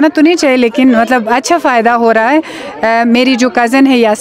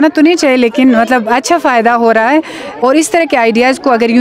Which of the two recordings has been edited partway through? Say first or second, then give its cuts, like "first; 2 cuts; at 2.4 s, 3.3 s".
second; 1 cut; at 2.6 s